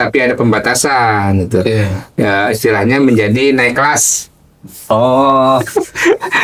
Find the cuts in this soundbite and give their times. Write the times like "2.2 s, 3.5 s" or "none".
none

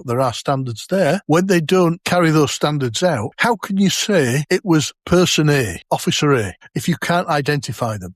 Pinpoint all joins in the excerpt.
1.2 s, 2.0 s, 3.3 s, 4.8 s, 5.8 s, 6.6 s

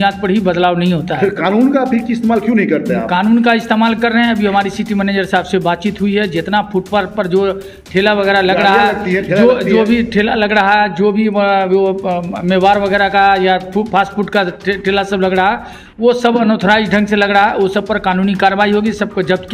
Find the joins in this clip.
none

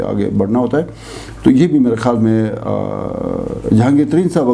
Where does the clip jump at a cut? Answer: none

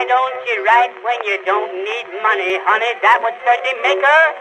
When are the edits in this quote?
2.5 s

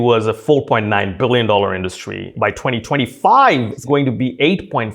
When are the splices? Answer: 2.3 s, 3.8 s

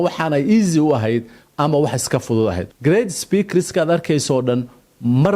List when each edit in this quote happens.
2.7 s

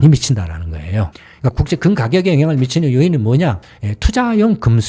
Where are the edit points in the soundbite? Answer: 1.5 s

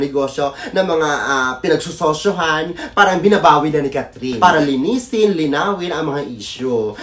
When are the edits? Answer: 4.3 s

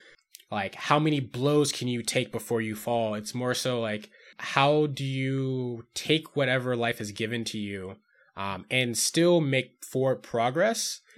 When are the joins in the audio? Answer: 4.3 s

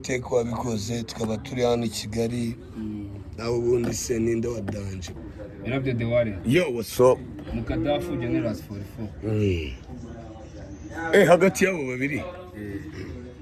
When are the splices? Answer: 5.1 s

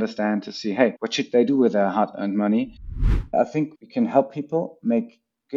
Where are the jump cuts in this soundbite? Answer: 1.0 s, 3.0 s

